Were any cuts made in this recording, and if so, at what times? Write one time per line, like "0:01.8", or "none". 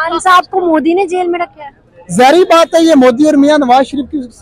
none